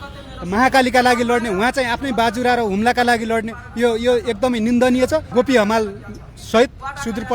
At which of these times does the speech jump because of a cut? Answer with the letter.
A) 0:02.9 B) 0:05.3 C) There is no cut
B